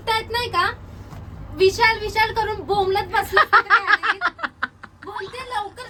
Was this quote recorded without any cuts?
yes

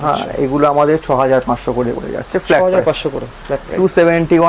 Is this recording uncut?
yes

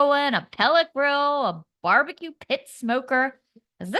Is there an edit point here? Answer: no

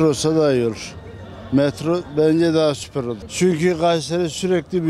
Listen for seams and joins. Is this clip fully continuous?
yes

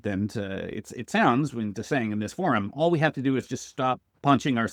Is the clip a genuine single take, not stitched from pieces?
yes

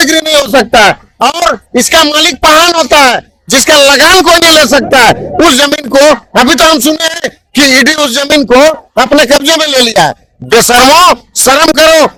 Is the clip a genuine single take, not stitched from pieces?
yes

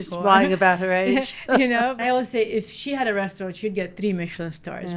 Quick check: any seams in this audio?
yes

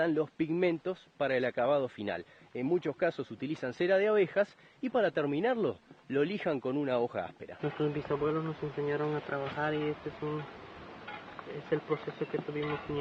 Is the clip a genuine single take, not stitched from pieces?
no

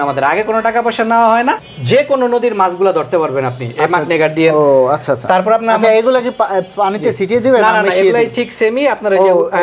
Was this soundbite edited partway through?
yes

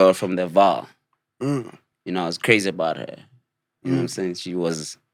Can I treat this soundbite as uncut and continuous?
yes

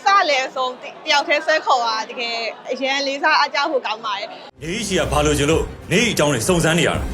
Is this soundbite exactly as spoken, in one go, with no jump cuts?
no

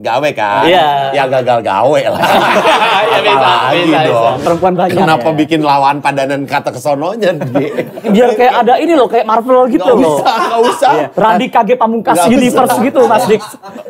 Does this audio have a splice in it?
yes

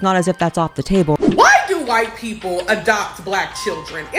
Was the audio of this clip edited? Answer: yes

